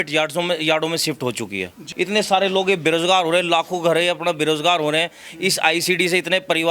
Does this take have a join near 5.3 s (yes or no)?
no